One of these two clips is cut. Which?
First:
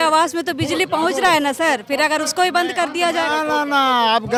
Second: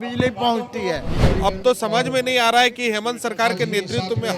second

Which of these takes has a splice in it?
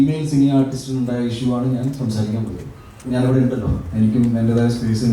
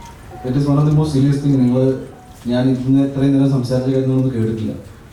first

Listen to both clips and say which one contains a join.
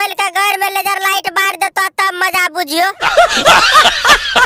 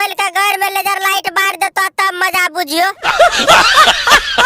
second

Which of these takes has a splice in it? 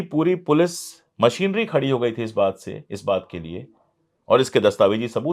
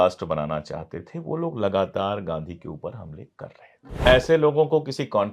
second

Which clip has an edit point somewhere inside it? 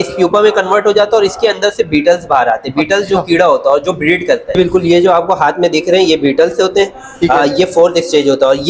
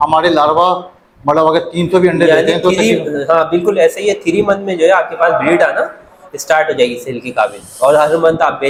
first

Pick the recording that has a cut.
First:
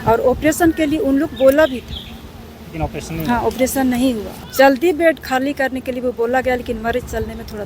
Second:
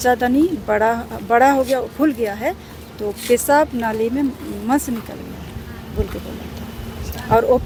first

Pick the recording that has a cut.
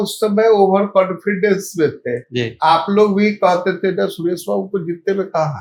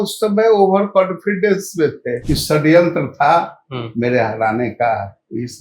second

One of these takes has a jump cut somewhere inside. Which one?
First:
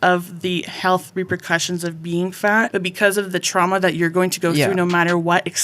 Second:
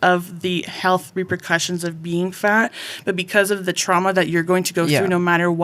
first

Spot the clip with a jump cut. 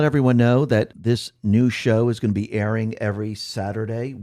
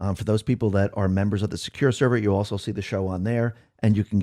first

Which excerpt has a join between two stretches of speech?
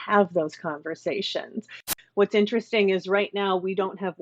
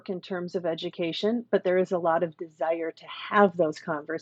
first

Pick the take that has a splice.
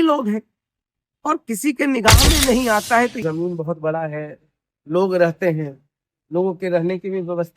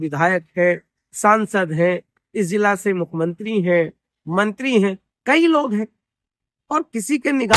first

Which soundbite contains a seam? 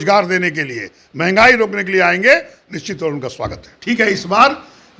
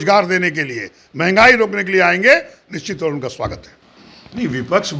first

